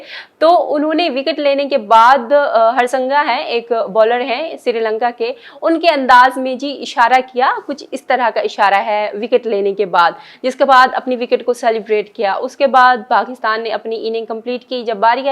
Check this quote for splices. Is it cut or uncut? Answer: uncut